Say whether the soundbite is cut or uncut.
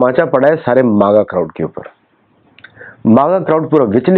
uncut